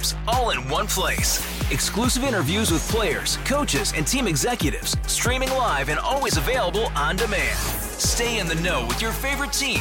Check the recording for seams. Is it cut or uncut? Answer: uncut